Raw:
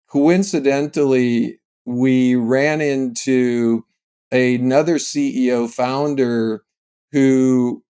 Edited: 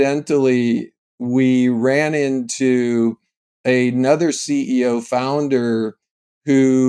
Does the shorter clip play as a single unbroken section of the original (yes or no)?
yes